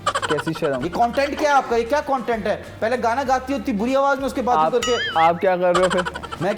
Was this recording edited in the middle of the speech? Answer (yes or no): no